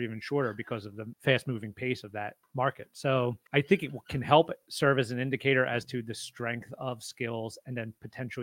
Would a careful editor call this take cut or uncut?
cut